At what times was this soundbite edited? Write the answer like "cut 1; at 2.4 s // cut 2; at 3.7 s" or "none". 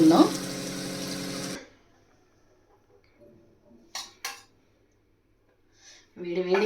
cut 1; at 1.6 s